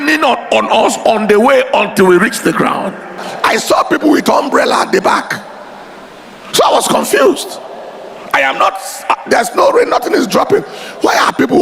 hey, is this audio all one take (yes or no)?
no